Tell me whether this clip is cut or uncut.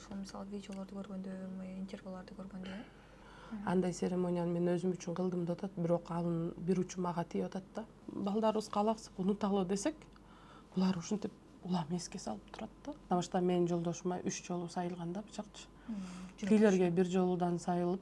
cut